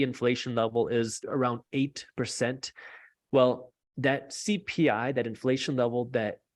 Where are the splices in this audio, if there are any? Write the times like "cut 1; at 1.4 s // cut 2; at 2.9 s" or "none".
cut 1; at 1.2 s